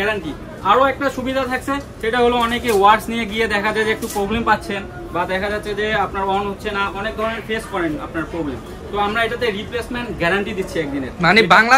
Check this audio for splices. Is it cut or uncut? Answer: uncut